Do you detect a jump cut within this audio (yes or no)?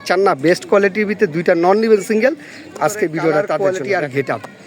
yes